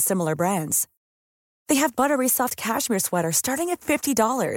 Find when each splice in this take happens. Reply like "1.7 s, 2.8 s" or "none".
none